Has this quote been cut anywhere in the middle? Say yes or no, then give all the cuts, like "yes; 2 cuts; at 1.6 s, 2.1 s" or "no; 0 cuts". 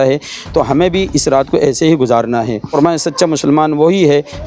yes; 1 cut; at 2.7 s